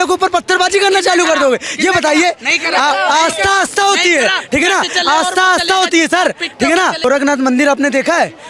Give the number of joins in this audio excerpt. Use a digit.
1